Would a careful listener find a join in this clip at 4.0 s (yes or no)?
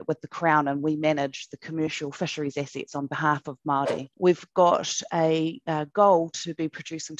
yes